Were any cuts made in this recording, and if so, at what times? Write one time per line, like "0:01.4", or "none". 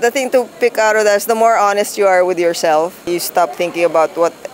0:03.1